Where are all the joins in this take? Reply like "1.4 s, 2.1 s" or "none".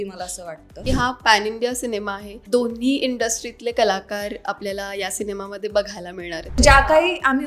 0.8 s, 2.3 s, 6.5 s